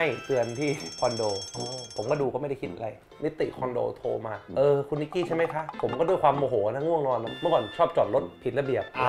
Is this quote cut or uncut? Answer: cut